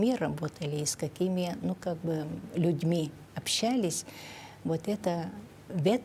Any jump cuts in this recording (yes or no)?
no